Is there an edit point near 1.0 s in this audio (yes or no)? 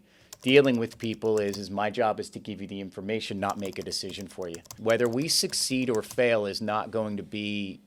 no